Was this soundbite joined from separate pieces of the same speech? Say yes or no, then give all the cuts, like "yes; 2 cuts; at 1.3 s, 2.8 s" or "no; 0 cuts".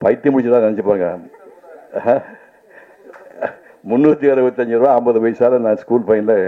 no; 0 cuts